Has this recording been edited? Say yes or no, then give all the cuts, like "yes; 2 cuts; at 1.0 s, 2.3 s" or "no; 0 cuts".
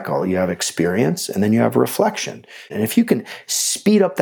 yes; 1 cut; at 2.6 s